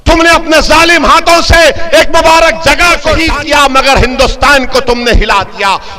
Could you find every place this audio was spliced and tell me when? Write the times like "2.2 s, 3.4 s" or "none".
3.2 s

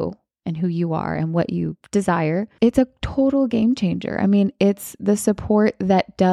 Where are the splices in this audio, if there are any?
2.5 s

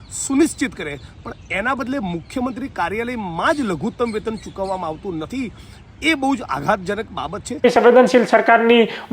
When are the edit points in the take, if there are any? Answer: 7.6 s

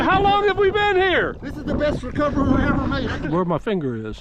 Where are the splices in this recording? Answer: 3.1 s

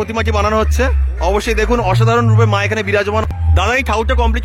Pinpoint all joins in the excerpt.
3.2 s

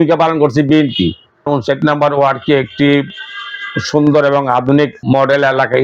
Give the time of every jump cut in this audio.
1.5 s

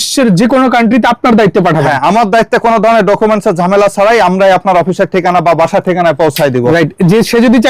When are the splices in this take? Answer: none

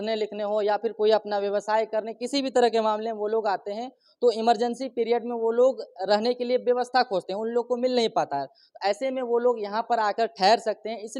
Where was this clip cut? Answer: none

